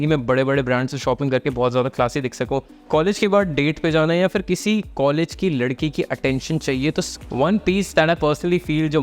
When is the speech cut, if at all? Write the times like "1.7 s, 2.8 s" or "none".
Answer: 2.8 s, 7.2 s